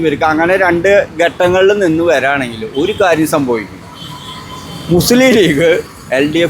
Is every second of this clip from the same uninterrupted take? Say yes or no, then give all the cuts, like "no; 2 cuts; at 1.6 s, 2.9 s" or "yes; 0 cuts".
yes; 0 cuts